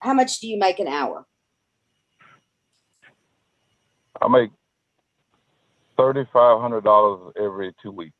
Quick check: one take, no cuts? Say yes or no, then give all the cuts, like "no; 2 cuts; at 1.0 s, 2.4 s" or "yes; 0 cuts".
yes; 0 cuts